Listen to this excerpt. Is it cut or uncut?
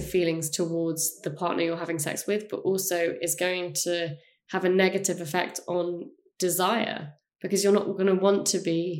uncut